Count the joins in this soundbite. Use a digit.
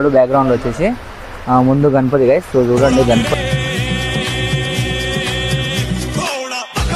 0